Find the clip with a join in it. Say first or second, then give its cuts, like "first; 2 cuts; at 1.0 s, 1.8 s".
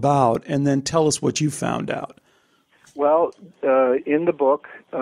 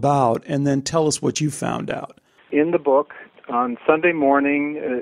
second; 2 cuts; at 2.5 s, 3.2 s